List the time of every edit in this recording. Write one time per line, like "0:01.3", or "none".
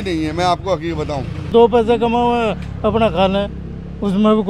0:01.5